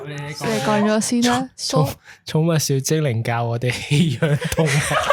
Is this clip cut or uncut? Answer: uncut